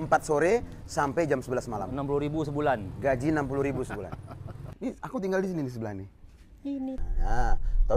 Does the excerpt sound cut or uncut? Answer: cut